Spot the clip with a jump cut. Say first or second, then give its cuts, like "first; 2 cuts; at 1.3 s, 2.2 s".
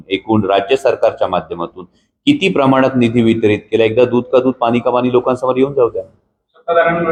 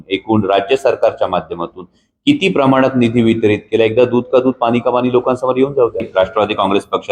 second; 1 cut; at 6.1 s